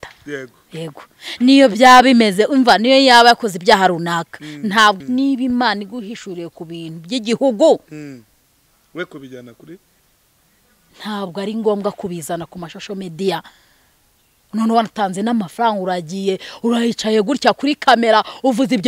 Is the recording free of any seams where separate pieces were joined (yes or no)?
no